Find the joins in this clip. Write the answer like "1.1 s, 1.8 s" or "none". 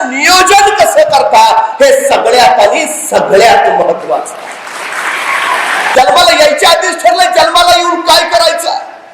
5.8 s